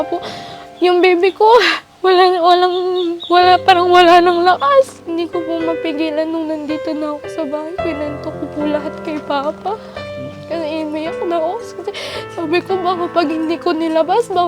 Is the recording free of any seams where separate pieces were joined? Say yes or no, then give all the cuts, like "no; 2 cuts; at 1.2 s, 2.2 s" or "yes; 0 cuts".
no; 1 cut; at 5.0 s